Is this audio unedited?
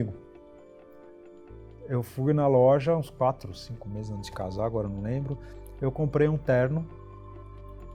yes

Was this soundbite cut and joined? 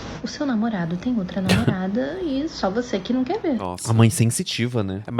yes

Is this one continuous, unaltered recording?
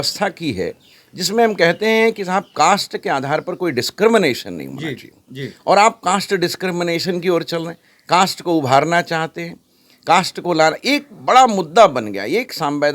yes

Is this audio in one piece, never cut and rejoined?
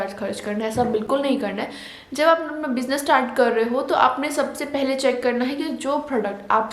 yes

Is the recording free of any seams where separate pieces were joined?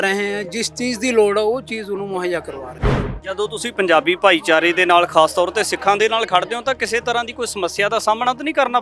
no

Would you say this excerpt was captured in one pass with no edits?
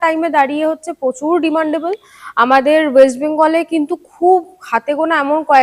yes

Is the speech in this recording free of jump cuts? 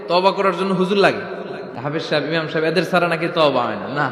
no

